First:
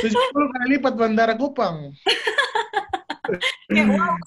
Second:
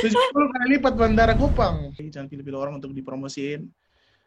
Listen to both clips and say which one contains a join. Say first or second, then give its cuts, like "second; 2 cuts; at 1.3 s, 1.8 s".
second; 1 cut; at 2.0 s